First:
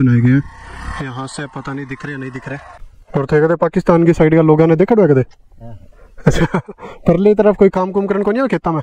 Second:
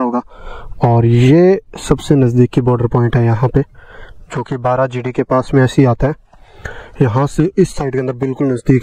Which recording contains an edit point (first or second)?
first